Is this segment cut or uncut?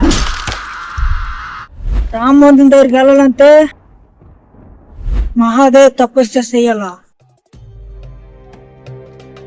cut